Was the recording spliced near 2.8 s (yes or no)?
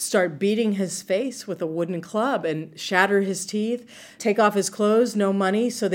no